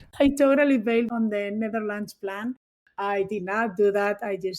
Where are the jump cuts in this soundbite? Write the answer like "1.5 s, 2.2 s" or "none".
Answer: 1.1 s